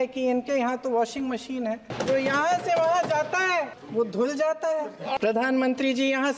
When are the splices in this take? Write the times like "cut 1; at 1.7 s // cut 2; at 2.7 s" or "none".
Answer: cut 1; at 1.9 s // cut 2; at 5.2 s

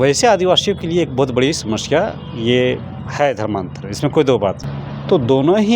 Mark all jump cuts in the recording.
cut 1; at 4.6 s

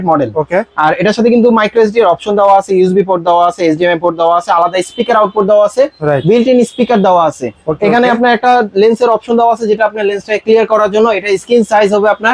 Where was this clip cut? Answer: none

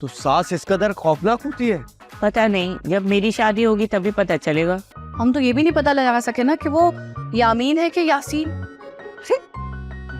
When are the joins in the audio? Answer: cut 1; at 4.9 s

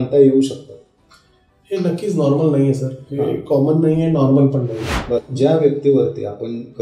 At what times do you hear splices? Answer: cut 1; at 5.3 s

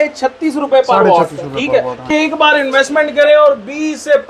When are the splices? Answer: cut 1; at 2.1 s

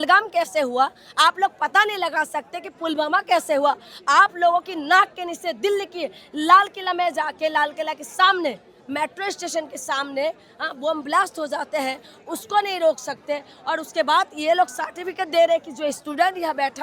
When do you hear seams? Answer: none

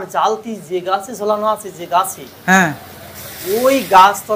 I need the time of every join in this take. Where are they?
none

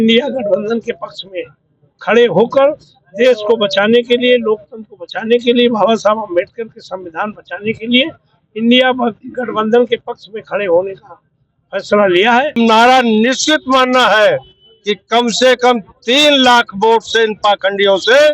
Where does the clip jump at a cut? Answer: cut 1; at 12.6 s

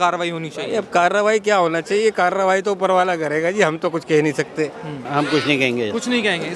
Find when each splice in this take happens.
cut 1; at 5.0 s

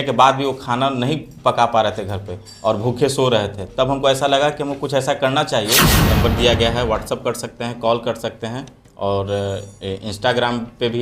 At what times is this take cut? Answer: cut 1; at 5.9 s

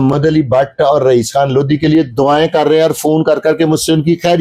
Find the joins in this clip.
none

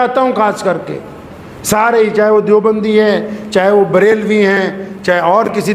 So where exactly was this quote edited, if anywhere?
none

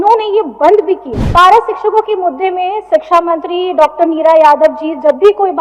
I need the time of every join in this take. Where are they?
cut 1; at 1.1 s

